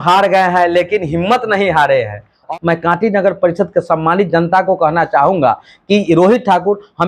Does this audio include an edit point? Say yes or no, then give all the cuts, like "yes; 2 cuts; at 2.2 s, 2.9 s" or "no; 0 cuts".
yes; 1 cut; at 2.5 s